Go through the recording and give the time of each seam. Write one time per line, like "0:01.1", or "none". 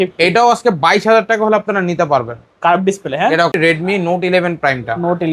0:03.5